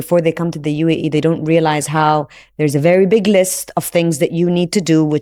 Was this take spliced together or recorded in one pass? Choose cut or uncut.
uncut